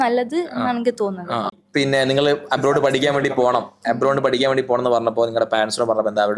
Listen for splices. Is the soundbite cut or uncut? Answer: cut